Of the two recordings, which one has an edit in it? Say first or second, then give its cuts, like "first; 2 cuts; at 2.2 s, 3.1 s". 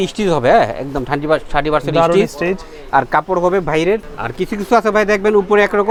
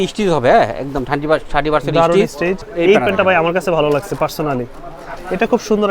second; 1 cut; at 2.7 s